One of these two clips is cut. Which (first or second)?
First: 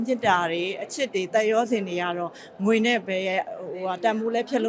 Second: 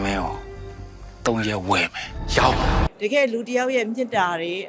second